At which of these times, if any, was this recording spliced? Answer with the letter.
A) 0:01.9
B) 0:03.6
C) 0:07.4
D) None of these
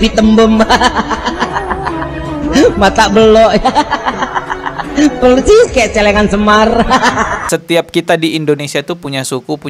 C